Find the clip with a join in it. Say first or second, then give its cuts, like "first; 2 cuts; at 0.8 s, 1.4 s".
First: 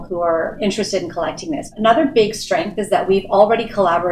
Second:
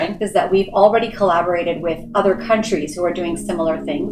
first; 1 cut; at 1.7 s